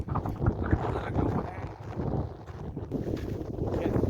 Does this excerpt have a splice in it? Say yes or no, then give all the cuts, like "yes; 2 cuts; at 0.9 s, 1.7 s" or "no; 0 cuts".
yes; 1 cut; at 2.9 s